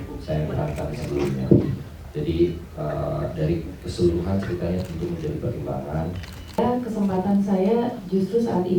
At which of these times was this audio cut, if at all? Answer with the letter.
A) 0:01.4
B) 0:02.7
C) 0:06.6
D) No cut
C